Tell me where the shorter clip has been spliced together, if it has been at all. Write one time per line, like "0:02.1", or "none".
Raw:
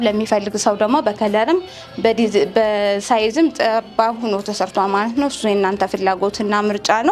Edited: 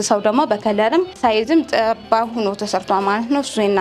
0:01.1